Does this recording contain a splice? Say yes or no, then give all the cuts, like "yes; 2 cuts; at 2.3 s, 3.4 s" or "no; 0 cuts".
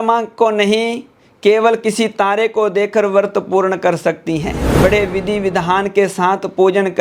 yes; 1 cut; at 4.6 s